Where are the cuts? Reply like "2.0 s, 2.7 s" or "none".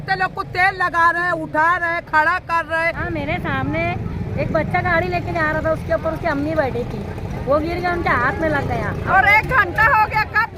3.0 s, 9.0 s